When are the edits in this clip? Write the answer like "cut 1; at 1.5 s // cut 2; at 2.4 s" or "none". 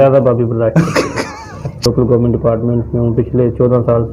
cut 1; at 1.8 s